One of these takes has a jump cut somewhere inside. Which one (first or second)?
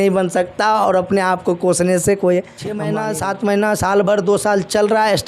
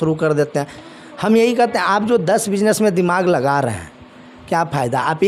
first